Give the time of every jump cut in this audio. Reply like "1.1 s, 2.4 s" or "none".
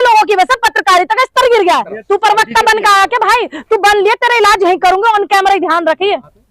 1.9 s